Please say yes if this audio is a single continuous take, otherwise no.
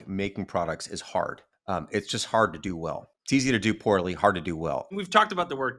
no